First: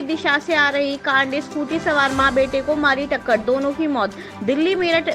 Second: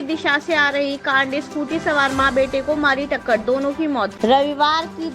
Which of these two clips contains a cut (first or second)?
second